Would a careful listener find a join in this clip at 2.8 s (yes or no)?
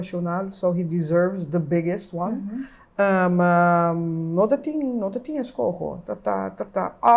no